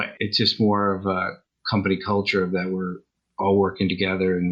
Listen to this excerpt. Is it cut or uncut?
uncut